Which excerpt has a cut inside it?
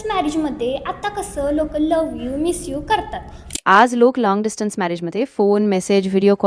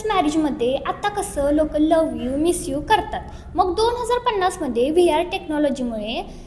first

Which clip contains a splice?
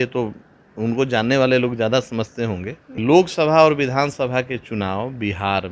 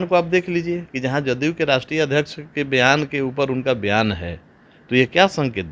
first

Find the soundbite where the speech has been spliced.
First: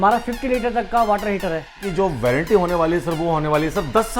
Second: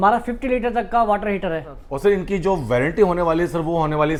first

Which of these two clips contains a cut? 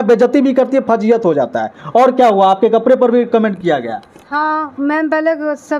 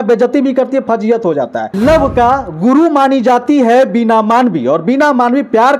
second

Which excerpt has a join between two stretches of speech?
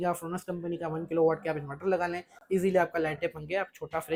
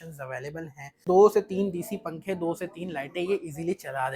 second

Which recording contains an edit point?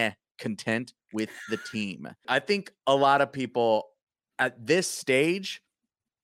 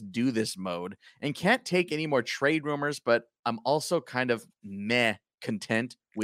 first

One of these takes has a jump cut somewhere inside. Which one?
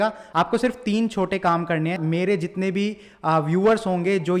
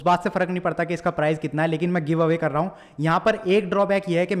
first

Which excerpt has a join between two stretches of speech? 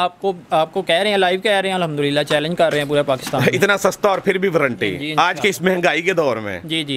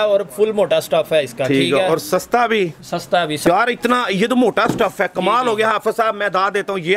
second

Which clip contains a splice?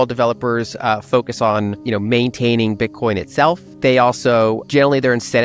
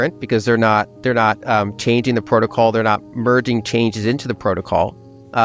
first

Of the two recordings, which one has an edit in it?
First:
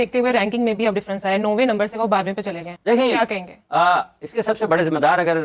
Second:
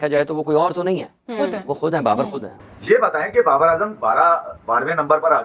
second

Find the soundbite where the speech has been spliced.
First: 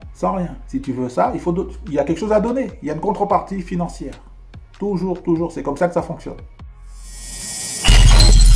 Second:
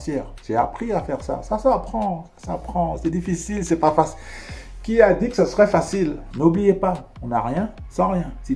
second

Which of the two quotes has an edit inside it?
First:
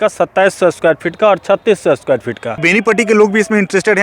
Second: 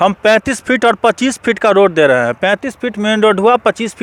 first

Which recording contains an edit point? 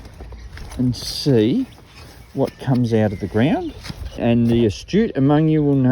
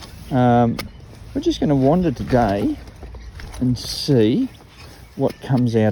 first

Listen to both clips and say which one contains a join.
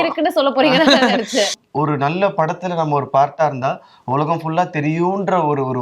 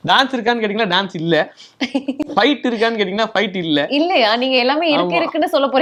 first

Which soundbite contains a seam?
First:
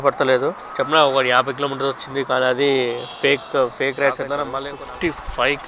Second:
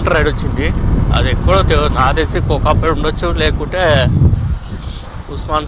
first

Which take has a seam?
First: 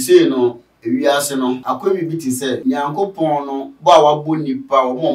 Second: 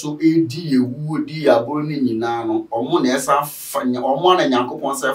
first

